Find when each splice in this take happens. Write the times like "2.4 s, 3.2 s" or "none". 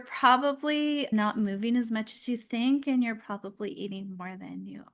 1.1 s